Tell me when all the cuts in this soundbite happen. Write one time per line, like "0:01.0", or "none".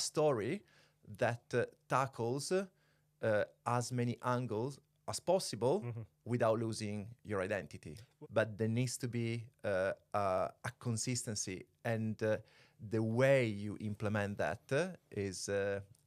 0:08.0